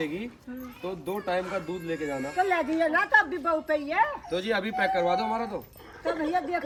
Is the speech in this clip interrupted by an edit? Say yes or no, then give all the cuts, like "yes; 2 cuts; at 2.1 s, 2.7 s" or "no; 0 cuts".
no; 0 cuts